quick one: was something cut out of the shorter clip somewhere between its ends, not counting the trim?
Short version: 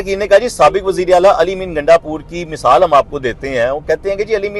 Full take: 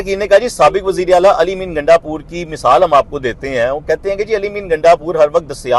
no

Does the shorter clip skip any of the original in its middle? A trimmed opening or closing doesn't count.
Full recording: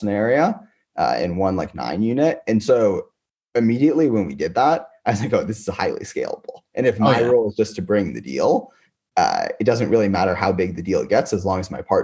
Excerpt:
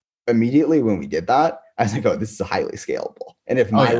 no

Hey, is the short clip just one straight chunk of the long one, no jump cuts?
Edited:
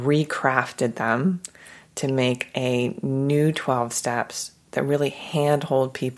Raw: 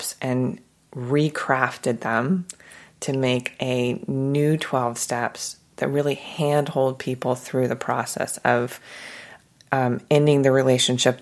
yes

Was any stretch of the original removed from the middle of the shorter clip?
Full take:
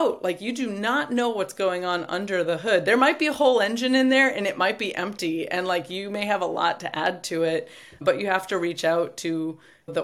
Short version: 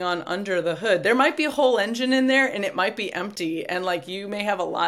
no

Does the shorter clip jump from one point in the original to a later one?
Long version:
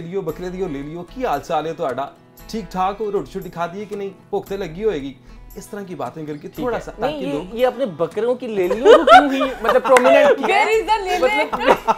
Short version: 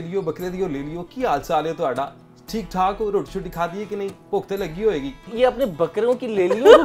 yes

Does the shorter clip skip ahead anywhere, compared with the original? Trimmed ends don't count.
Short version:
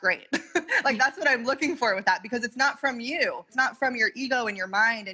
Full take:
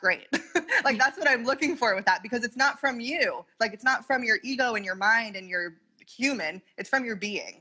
yes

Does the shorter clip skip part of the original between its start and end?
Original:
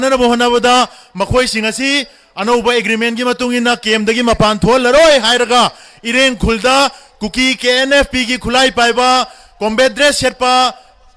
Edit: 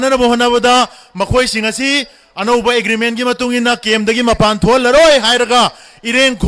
no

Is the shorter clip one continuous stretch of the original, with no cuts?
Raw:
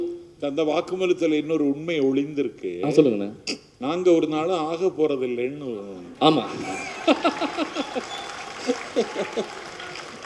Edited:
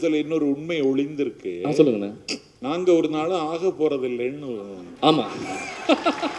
yes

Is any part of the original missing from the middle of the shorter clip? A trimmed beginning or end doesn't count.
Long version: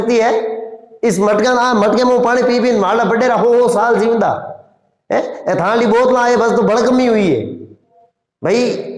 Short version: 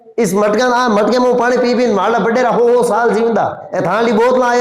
yes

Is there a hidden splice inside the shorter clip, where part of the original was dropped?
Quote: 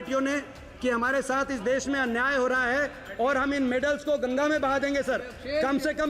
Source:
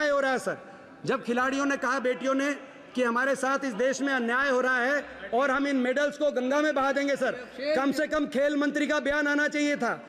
no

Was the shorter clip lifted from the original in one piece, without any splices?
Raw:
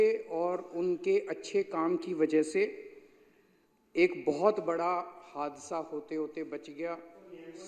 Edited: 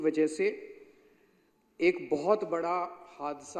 yes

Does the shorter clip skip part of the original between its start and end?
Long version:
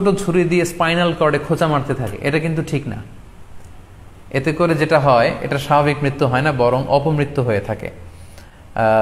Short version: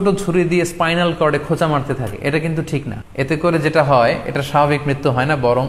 yes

